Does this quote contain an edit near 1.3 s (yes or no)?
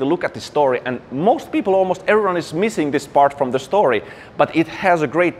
no